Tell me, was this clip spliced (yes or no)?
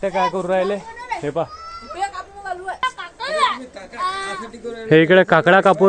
no